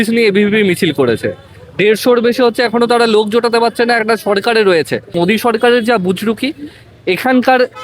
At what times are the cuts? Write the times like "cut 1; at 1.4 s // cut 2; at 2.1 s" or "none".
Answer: cut 1; at 5.1 s